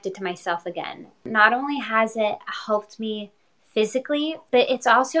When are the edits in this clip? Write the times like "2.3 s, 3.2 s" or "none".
1.3 s, 4.4 s